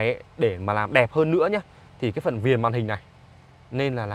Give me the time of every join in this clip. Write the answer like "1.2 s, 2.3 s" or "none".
none